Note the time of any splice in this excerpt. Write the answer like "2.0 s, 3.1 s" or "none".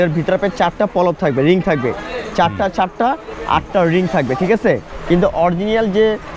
4.9 s